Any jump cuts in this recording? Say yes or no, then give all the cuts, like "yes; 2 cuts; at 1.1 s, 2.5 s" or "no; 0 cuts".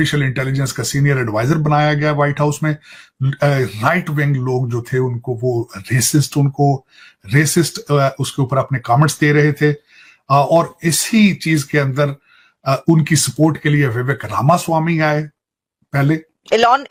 no; 0 cuts